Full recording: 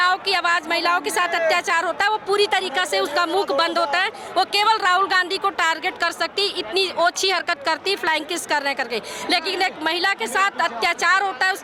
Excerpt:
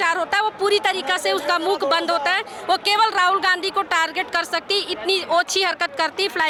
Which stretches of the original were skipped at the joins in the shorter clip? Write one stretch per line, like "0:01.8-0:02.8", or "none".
none